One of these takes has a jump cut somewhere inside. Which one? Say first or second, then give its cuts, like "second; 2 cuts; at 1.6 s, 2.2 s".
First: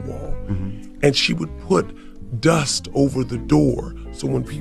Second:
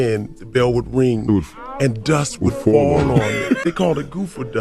second; 1 cut; at 3.6 s